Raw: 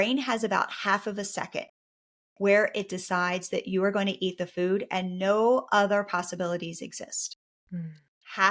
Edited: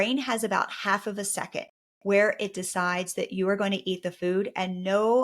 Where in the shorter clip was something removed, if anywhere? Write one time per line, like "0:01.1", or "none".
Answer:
0:01.8